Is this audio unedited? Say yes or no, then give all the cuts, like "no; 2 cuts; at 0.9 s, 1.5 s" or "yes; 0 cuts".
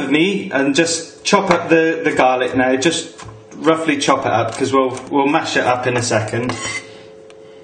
no; 1 cut; at 2.0 s